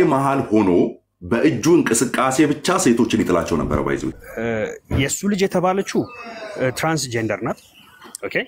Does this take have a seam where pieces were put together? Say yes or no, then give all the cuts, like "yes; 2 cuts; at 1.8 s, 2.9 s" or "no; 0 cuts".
yes; 1 cut; at 4.2 s